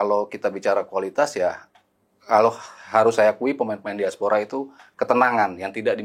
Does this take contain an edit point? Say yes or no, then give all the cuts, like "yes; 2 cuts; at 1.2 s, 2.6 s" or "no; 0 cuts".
no; 0 cuts